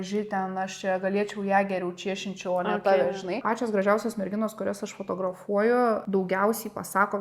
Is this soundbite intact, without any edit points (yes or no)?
no